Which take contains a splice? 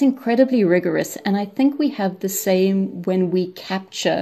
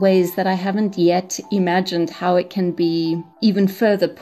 second; 1 cut; at 3.3 s

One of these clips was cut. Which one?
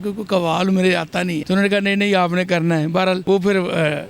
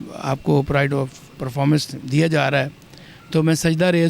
first; 2 cuts; at 1.4 s, 3.2 s

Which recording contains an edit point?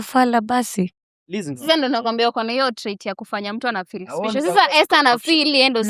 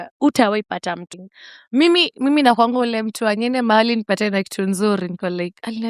second; 1 cut; at 1.1 s

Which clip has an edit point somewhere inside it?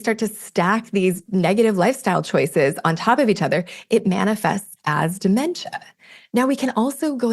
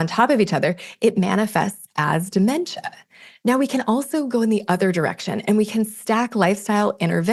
first; 1 cut; at 1.2 s

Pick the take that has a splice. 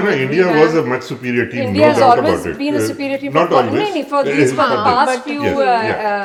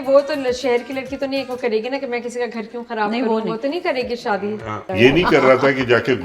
second; 1 cut; at 4.8 s

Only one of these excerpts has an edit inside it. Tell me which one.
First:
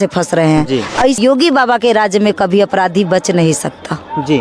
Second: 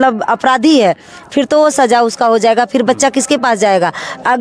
first; 1 cut; at 1.2 s

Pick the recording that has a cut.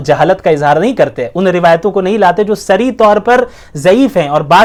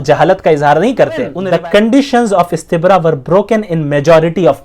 second; 1 cut; at 1.4 s

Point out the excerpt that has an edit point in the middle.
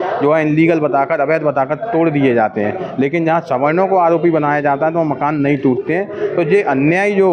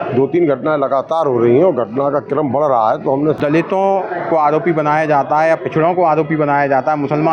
second; 1 cut; at 3.4 s

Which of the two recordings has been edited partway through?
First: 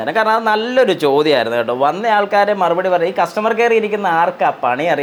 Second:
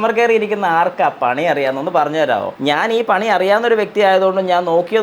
second; 1 cut; at 2.5 s

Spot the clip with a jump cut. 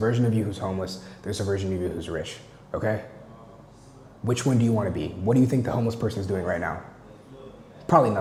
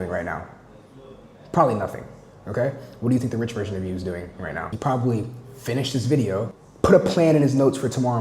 second; 2 cuts; at 4.7 s, 6.6 s

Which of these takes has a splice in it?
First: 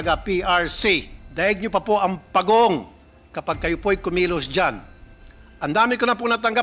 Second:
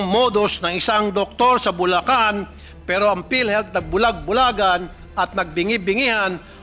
first; 1 cut; at 1.2 s

